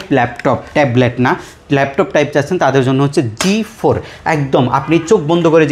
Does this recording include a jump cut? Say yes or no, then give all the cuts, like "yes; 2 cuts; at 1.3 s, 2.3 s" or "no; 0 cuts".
no; 0 cuts